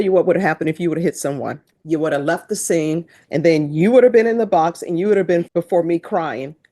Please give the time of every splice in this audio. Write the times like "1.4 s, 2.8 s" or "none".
1.7 s, 3.2 s, 5.5 s